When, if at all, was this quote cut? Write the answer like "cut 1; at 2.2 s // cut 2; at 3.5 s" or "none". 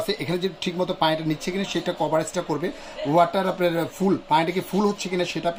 none

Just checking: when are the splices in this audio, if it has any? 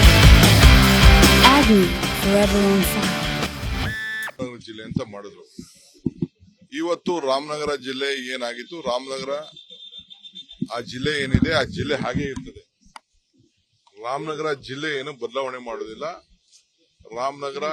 cut 1; at 4.3 s

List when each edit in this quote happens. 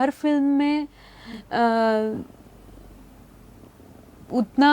none

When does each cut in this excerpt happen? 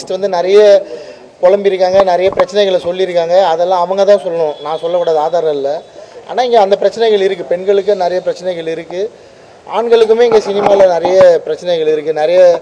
none

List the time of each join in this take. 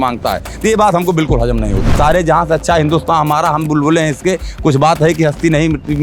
cut 1; at 1.9 s

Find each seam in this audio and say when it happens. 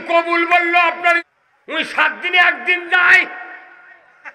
cut 1; at 1.3 s

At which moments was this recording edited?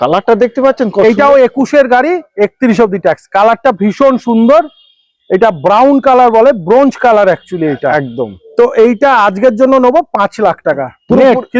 none

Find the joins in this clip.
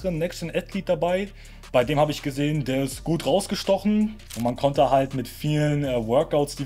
cut 1; at 4.2 s

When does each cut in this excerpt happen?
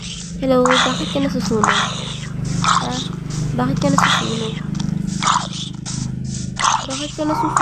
none

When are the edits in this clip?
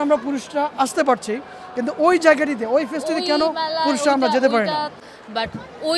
cut 1; at 5.0 s

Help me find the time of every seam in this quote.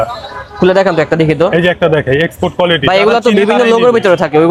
none

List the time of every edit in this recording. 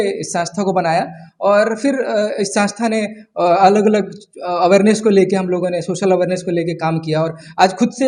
none

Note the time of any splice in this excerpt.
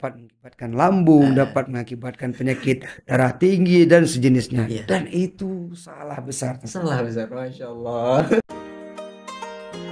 cut 1; at 8.5 s

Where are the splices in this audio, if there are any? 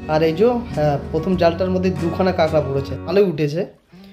cut 1; at 3.0 s

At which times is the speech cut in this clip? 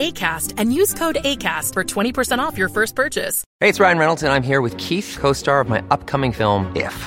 cut 1; at 3.4 s

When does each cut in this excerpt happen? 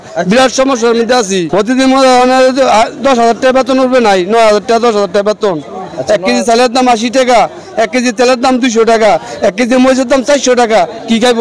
cut 1; at 1.5 s

